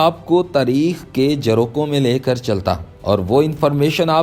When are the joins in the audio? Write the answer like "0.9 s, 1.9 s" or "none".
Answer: none